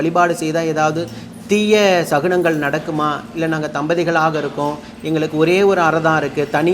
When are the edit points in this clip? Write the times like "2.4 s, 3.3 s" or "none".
none